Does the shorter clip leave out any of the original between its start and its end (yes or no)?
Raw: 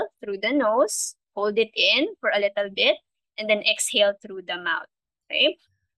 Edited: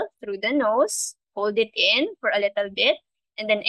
no